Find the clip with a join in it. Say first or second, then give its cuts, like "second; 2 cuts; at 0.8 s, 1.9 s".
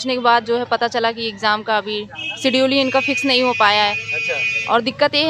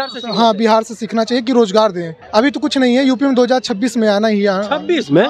second; 1 cut; at 2.1 s